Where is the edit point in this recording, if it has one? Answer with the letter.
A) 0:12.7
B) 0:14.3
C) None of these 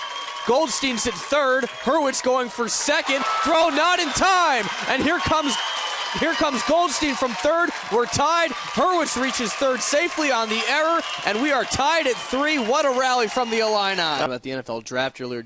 B